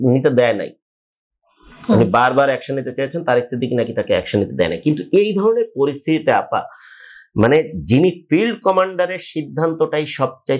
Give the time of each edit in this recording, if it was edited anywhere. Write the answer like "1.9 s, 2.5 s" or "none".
none